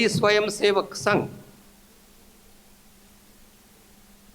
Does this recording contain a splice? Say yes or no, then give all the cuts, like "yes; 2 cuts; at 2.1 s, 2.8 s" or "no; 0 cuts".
no; 0 cuts